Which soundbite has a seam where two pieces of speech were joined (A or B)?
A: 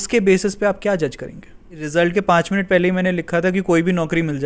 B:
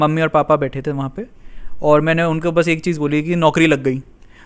A